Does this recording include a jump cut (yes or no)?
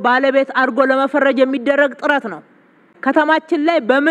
yes